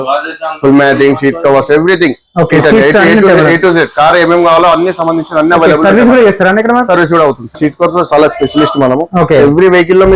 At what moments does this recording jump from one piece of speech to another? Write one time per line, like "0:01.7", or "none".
0:07.6